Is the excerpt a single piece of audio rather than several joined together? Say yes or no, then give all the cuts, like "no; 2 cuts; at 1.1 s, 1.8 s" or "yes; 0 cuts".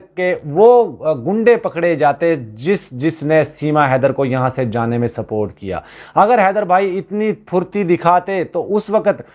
yes; 0 cuts